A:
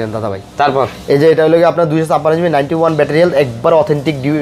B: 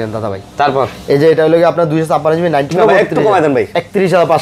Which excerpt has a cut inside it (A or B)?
B